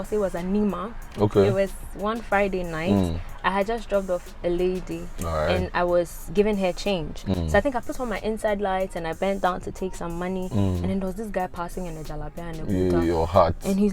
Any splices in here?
no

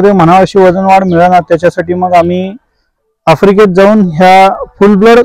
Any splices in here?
no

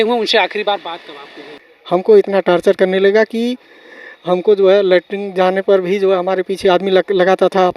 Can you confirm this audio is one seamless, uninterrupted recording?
no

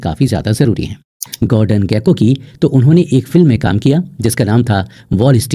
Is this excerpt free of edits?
no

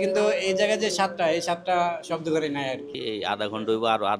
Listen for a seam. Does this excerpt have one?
yes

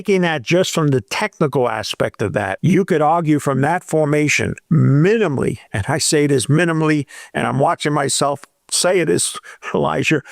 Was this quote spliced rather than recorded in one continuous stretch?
yes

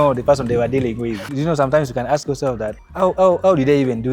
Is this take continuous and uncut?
no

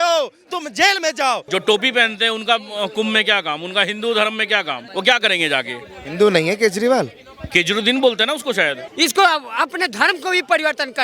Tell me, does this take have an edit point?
yes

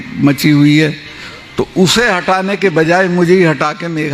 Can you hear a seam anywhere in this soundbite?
no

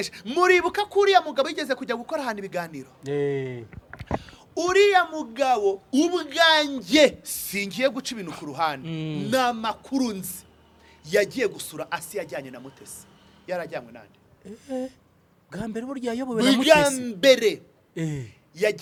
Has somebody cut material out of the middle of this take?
no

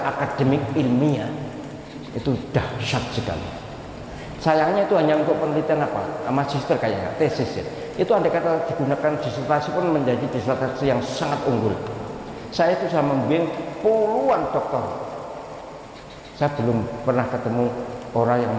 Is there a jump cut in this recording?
no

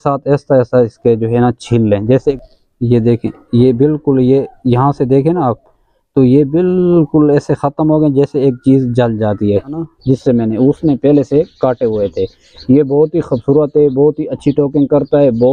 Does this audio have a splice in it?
yes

